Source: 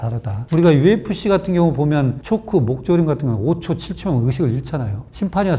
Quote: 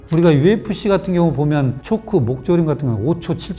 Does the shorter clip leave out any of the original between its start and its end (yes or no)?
no